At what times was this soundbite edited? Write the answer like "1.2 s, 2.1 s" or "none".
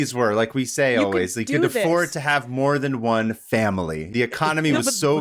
4.1 s